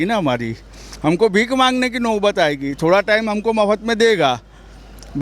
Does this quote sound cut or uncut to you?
uncut